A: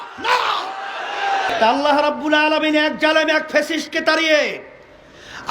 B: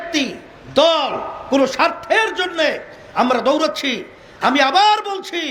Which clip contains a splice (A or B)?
A